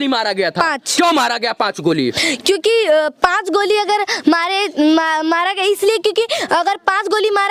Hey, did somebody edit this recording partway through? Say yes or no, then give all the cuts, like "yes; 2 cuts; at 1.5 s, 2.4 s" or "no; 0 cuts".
no; 0 cuts